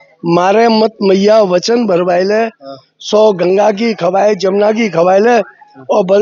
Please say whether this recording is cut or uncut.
uncut